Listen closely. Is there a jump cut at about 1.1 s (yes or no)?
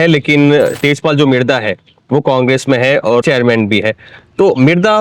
no